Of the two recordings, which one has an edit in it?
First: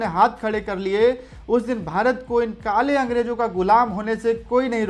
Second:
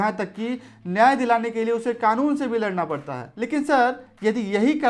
second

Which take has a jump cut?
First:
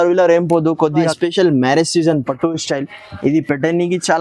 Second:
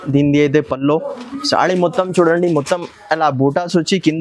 first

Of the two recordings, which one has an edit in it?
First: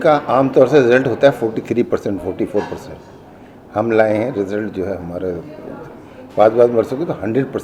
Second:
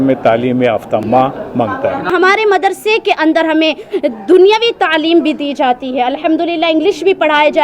second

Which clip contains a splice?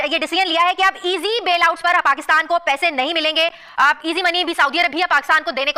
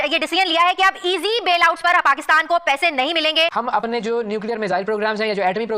second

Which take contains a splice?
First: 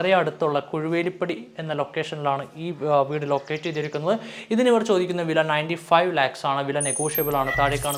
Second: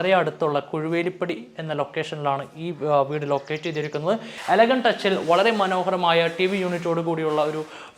second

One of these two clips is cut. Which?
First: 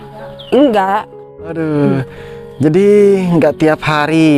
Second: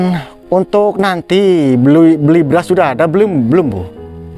first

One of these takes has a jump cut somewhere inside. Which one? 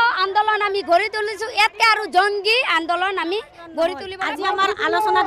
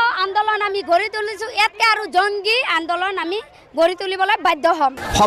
first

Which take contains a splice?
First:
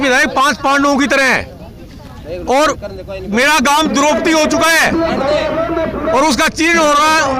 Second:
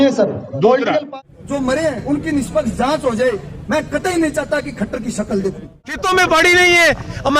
second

